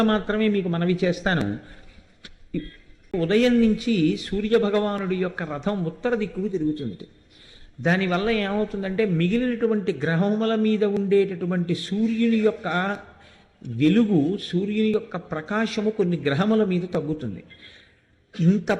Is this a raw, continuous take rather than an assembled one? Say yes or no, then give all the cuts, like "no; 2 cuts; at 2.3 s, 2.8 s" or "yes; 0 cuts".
no; 1 cut; at 3.1 s